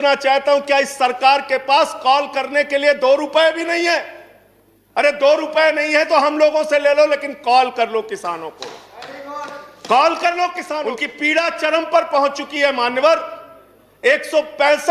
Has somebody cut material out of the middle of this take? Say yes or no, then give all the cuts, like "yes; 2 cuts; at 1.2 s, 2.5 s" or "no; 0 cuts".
yes; 1 cut; at 11.0 s